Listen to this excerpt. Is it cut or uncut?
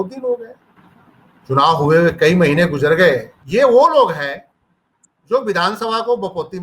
cut